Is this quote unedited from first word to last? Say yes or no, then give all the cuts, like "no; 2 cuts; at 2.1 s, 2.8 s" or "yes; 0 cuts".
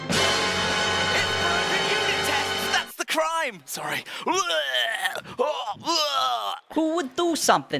yes; 0 cuts